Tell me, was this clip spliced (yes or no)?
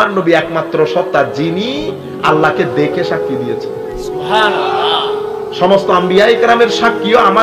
no